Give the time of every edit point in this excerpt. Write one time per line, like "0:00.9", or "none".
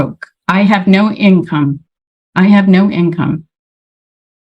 none